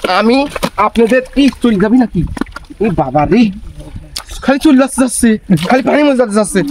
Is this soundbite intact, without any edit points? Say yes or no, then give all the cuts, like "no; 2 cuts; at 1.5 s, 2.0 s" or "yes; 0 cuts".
yes; 0 cuts